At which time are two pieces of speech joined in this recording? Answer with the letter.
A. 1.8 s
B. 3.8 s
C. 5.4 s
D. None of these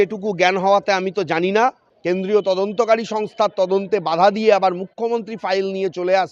A